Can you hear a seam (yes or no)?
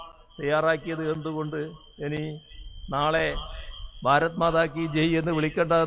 no